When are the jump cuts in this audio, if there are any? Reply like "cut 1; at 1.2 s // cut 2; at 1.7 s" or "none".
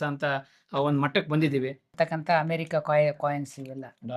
cut 1; at 1.9 s